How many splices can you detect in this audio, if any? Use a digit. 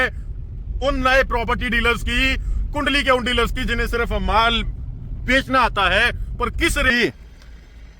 1